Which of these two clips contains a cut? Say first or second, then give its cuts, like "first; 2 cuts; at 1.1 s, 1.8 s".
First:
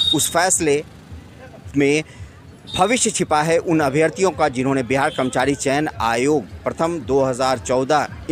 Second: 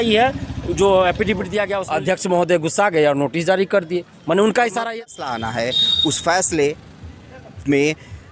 second; 2 cuts; at 1.8 s, 4.8 s